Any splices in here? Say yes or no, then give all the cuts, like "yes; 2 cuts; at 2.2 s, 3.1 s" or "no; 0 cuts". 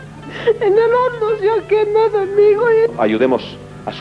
no; 0 cuts